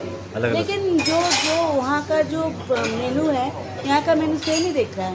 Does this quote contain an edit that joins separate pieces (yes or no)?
no